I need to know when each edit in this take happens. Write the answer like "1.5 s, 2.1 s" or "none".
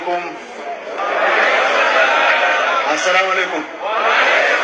none